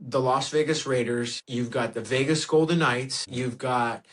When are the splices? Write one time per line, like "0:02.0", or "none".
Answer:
0:03.2